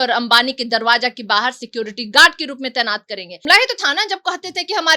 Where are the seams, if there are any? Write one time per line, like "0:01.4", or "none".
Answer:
0:03.4